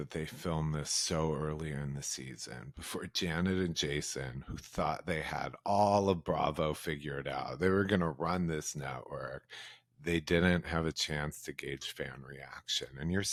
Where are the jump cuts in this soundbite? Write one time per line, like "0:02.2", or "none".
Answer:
none